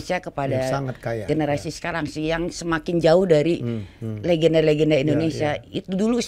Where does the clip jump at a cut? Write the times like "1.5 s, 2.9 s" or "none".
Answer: none